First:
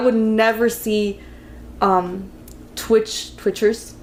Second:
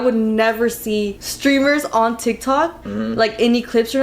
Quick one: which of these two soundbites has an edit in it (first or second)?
second